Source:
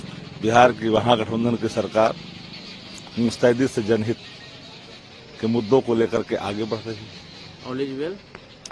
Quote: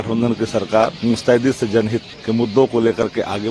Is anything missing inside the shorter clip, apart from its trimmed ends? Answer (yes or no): yes